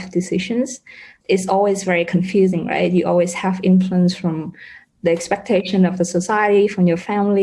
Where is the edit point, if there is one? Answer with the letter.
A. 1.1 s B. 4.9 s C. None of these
A